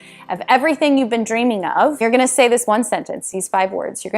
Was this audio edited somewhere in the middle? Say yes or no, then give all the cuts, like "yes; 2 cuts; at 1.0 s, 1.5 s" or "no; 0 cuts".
yes; 1 cut; at 2.0 s